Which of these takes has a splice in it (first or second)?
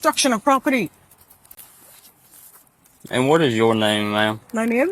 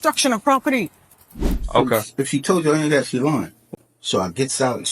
second